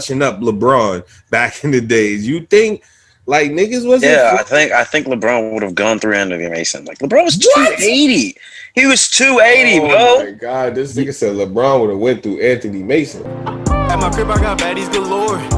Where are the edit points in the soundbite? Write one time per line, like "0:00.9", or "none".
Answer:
0:13.2